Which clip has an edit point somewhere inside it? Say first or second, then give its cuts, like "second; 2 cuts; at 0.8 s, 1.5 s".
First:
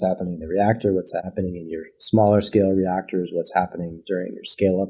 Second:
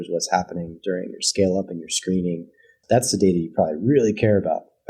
first; 1 cut; at 1.2 s